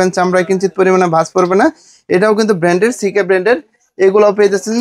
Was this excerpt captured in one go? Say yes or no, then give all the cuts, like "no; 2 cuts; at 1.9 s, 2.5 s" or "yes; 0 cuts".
yes; 0 cuts